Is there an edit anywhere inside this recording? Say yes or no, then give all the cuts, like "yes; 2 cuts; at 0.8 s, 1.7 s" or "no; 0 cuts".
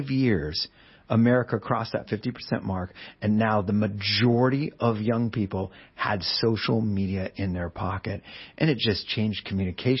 no; 0 cuts